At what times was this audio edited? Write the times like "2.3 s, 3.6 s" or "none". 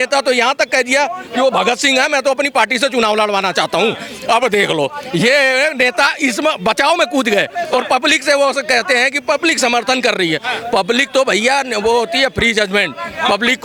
none